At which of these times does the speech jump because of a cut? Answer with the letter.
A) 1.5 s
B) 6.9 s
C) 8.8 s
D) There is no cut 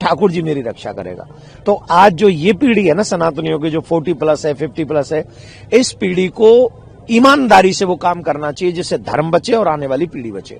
D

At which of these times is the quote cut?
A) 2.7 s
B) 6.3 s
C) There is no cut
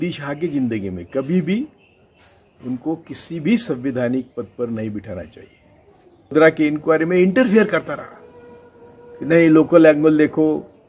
B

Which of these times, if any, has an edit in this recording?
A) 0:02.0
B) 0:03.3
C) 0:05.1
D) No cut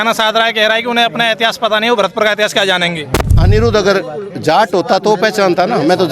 B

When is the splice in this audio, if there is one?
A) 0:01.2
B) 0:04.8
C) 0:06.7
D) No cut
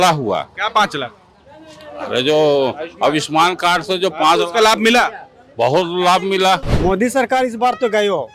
C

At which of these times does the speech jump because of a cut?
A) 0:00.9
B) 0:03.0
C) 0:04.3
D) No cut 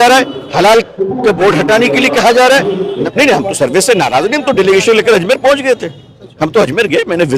B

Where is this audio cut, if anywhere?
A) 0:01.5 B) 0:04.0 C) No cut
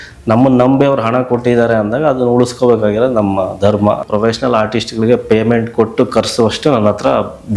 B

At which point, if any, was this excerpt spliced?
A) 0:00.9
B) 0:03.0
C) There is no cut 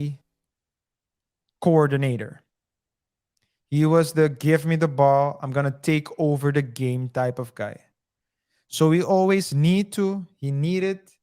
A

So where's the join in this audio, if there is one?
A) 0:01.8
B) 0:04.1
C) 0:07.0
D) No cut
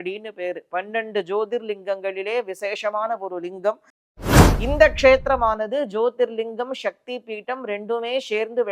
B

